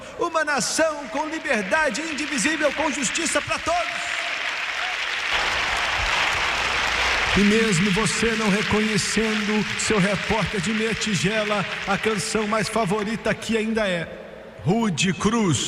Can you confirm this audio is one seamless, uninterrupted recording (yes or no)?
no